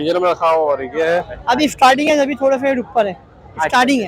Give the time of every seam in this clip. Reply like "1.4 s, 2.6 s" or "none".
1.3 s